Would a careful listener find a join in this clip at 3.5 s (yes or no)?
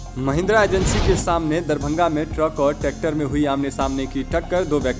no